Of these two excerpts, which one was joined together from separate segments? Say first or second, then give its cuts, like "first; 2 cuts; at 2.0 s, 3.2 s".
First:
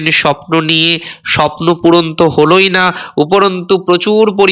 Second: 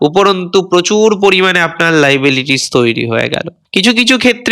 second; 1 cut; at 3.6 s